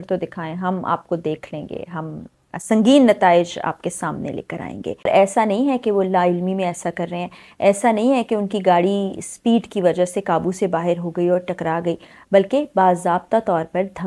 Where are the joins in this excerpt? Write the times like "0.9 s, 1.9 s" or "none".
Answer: 5.1 s